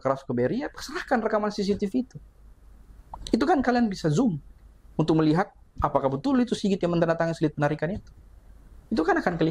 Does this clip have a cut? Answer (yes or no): no